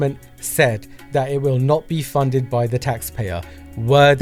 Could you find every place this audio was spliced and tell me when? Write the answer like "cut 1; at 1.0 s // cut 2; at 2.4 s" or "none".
none